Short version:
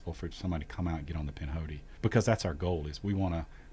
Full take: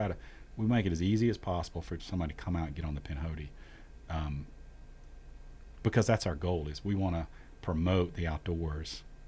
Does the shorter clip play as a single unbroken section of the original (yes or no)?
no